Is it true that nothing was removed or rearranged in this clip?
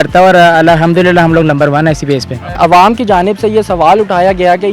no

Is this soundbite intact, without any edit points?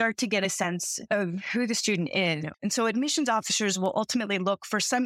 no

